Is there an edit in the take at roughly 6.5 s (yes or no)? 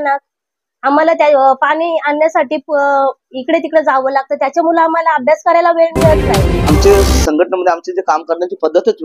yes